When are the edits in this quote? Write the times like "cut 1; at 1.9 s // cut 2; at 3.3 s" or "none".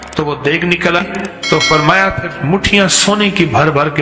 cut 1; at 1.0 s